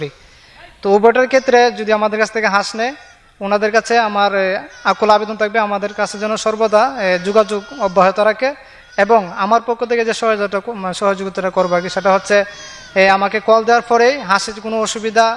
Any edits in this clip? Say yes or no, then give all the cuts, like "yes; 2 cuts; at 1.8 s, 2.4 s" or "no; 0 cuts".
no; 0 cuts